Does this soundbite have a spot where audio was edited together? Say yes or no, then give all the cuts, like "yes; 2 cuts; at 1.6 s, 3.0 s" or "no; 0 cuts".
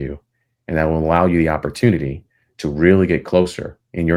no; 0 cuts